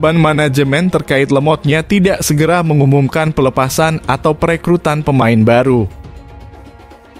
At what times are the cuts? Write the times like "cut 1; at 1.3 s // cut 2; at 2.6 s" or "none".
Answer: cut 1; at 6.0 s

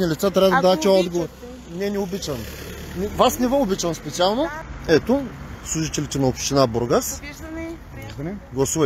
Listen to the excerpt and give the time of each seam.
cut 1; at 4.7 s

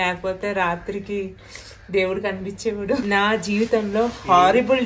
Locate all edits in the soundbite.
cut 1; at 3.0 s

